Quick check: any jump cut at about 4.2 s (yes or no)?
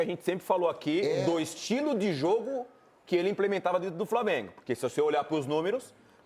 no